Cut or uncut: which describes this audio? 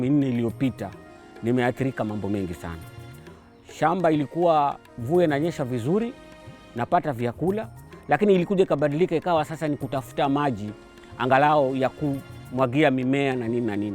cut